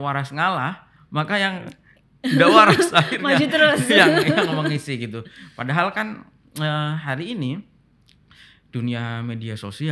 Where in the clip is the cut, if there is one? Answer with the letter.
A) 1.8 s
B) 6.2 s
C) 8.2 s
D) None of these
D